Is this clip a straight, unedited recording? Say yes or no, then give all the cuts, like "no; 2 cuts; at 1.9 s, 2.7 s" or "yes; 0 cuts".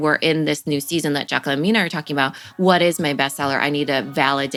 yes; 0 cuts